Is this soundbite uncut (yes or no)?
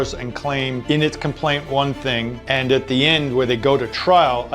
no